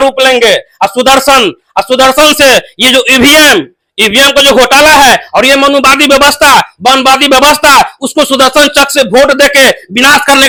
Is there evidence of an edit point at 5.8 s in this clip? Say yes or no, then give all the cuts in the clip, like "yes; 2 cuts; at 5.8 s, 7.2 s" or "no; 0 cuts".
no; 0 cuts